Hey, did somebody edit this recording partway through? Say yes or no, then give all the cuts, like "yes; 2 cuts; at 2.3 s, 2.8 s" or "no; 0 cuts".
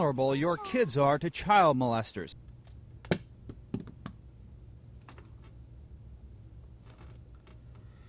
no; 0 cuts